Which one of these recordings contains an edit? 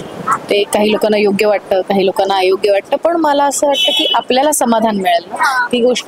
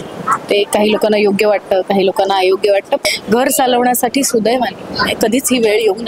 second; 1 cut; at 3.0 s

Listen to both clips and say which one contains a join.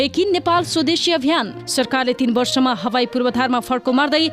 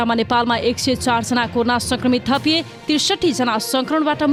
first; 1 cut; at 1.6 s

